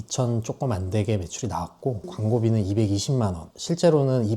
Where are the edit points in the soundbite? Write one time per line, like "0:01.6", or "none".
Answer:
0:02.1